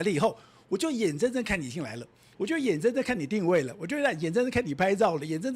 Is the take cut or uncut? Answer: uncut